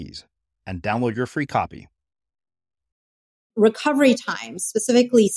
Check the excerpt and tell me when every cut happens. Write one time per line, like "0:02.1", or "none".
0:03.5